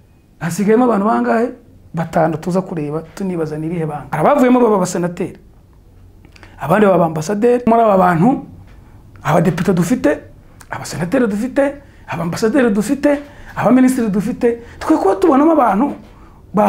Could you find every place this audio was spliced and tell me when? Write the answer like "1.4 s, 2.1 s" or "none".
4.0 s, 7.7 s